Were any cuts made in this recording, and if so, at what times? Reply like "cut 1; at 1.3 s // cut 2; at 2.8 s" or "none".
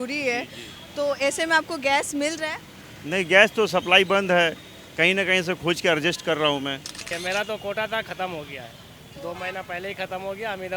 cut 1; at 7.1 s

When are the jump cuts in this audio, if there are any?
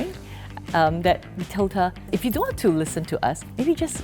none

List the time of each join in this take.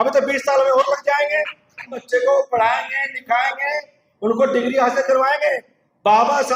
cut 1; at 2.0 s

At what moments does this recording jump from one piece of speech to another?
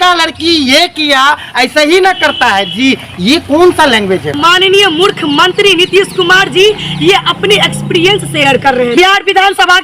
cut 1; at 4.4 s // cut 2; at 8.9 s

